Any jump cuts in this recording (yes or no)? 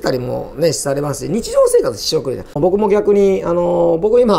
yes